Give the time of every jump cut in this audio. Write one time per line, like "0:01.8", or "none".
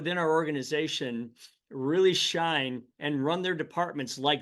none